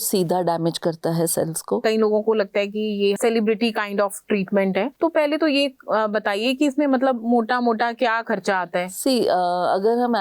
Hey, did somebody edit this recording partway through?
yes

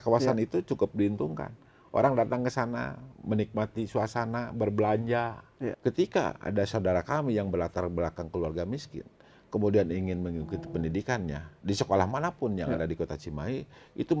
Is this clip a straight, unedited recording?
no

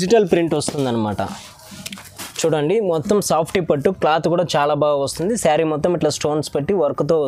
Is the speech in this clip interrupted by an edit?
no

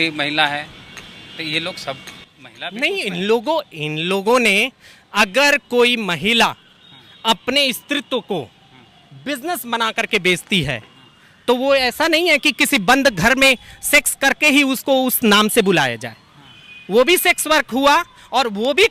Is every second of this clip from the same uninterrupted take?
yes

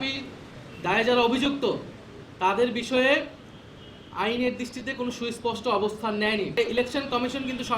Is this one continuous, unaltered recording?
no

